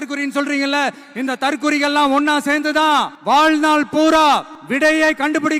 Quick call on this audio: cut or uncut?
cut